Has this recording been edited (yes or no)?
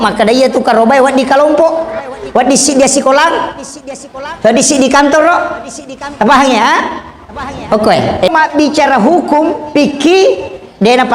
yes